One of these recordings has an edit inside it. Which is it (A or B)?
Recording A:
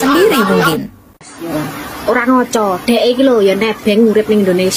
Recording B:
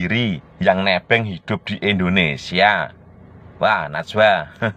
A